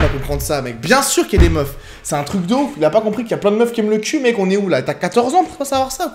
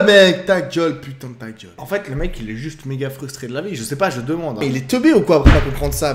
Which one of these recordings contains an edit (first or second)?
second